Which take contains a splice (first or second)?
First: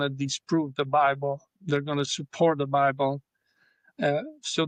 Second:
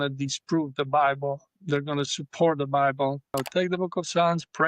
second